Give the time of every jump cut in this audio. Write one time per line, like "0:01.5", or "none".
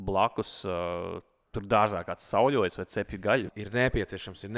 0:03.5